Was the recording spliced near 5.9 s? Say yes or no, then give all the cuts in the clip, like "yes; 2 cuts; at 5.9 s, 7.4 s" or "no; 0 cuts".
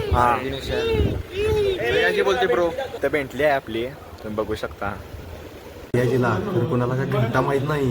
yes; 1 cut; at 5.9 s